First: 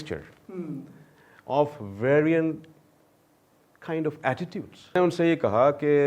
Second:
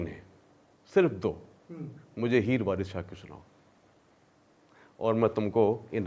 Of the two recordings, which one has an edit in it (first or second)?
first